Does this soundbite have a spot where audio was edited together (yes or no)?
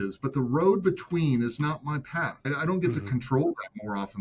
yes